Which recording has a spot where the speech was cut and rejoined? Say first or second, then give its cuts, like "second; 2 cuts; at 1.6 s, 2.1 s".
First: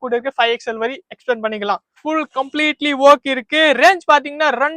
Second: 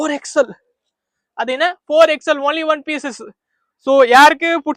first; 1 cut; at 2.0 s